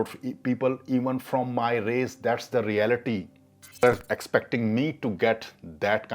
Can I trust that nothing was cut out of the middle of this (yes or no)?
no